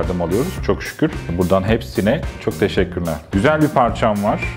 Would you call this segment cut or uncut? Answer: cut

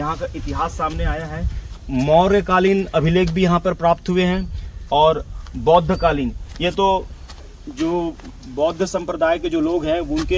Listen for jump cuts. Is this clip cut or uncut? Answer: uncut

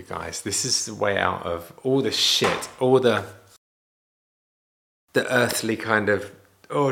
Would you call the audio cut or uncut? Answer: uncut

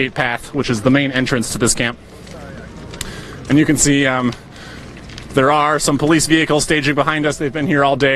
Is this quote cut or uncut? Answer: uncut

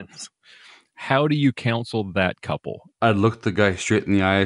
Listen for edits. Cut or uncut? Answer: cut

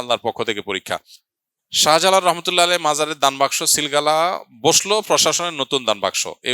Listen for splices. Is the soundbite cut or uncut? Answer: cut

